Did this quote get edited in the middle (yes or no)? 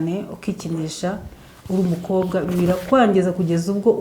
no